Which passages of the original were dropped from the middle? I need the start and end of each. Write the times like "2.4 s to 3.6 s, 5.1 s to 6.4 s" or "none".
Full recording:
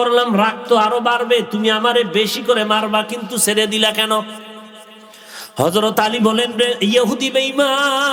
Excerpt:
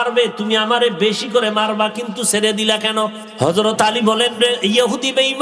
4.4 s to 5.4 s